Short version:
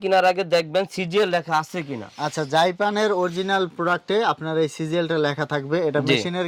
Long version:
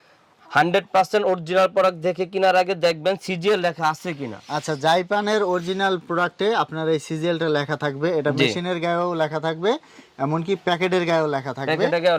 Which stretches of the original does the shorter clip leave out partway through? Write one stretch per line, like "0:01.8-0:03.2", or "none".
none

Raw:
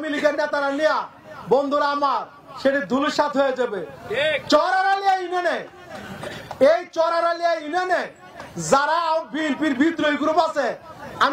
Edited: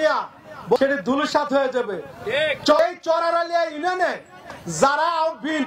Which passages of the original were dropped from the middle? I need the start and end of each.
0:01.6-0:02.6
0:04.6-0:06.7

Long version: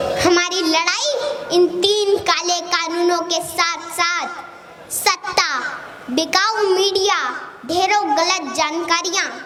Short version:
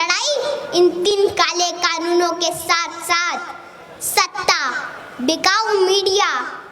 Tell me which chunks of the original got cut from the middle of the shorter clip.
0:01.9-0:02.0

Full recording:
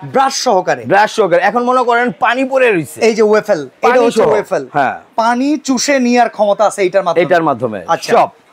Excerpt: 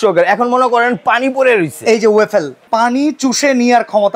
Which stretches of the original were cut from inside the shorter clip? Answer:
0:03.7-0:05.0

